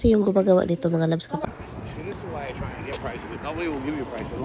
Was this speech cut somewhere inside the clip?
yes; 1 cut; at 1.5 s

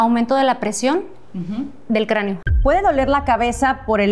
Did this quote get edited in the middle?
yes; 1 cut; at 2.4 s

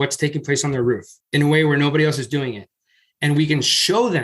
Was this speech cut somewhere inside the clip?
no; 0 cuts

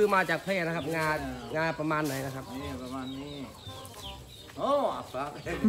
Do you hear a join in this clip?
no; 0 cuts

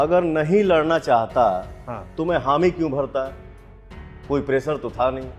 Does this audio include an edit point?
no; 0 cuts

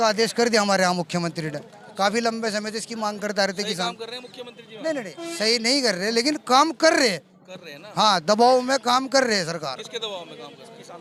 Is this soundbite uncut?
yes; 0 cuts

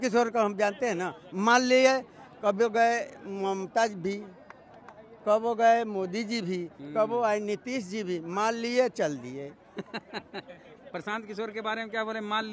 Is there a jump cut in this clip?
no; 0 cuts

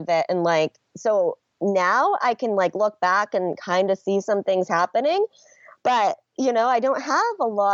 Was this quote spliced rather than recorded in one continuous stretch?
no; 0 cuts

